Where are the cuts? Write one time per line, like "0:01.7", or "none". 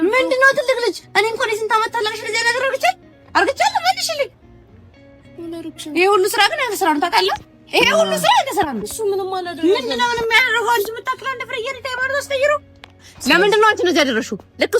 0:13.1